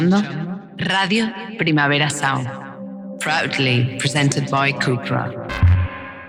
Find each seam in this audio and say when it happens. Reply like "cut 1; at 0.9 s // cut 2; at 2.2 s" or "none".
none